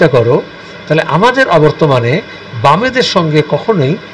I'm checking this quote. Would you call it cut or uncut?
uncut